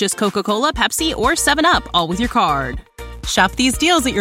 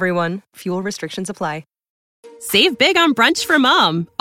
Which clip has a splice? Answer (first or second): second